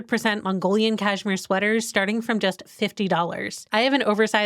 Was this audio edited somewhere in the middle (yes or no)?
yes